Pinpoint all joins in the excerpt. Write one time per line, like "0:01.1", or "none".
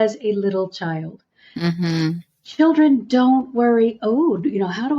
none